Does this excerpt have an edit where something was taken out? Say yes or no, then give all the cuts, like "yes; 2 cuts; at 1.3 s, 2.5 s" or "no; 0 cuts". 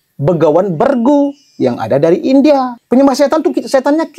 yes; 1 cut; at 2.8 s